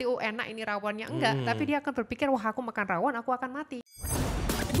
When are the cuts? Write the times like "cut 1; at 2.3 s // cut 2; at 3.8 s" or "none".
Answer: cut 1; at 3.8 s

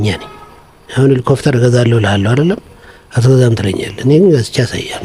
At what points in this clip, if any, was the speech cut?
none

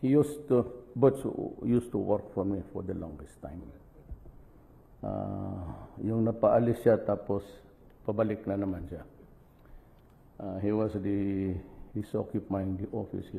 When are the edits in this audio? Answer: none

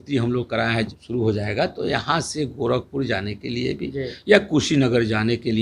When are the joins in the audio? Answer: cut 1; at 0.9 s

